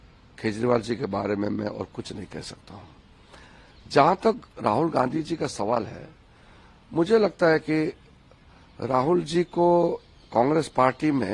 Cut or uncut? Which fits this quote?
uncut